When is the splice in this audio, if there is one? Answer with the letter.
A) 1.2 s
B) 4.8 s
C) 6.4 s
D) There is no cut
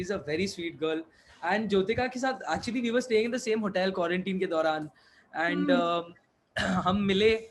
D